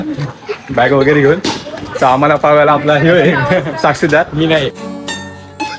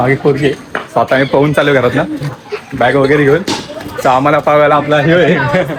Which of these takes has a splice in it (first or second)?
first